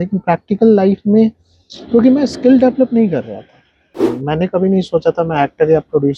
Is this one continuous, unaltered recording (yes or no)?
no